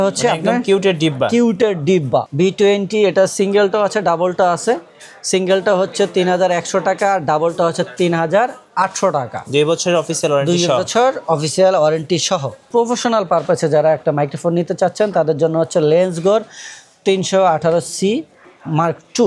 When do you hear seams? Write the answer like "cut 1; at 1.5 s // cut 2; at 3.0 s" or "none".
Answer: cut 1; at 2.3 s // cut 2; at 12.7 s

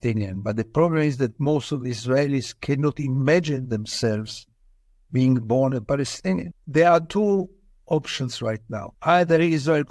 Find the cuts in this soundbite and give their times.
cut 1; at 6.6 s // cut 2; at 8.9 s

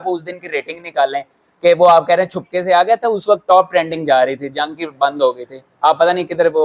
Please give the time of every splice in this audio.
none

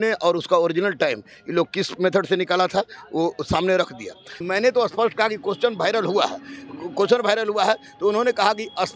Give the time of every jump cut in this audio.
cut 1; at 4.4 s

